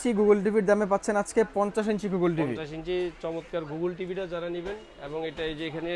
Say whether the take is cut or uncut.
uncut